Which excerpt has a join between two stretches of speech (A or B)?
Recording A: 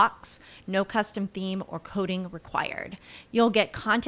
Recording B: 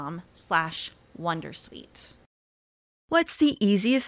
B